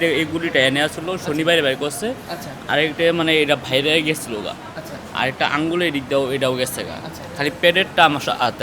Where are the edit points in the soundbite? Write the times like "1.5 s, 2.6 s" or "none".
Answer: none